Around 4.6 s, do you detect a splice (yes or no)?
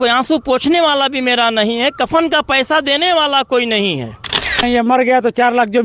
yes